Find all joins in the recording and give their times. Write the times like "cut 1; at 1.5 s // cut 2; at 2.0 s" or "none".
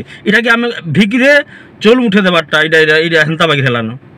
none